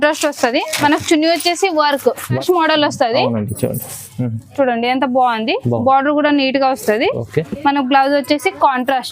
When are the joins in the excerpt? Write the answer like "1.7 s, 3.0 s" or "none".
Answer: 2.4 s